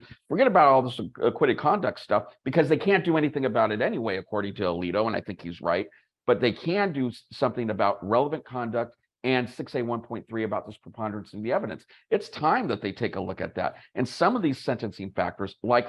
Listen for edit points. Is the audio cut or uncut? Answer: uncut